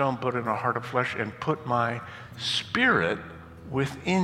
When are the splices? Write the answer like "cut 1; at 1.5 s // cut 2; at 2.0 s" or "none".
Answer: none